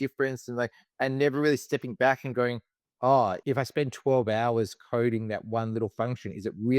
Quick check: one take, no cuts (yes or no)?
no